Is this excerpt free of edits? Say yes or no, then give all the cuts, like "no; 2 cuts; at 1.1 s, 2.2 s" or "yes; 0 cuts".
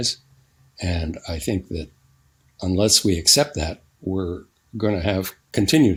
yes; 0 cuts